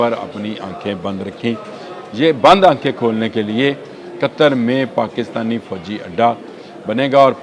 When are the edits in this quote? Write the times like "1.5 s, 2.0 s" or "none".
none